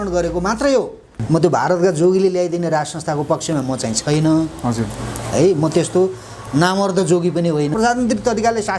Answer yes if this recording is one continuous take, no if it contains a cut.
no